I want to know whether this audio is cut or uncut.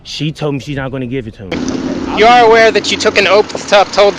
cut